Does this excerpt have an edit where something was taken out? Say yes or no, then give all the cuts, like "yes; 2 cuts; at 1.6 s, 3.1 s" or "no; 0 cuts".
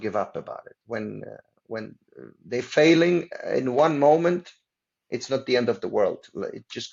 no; 0 cuts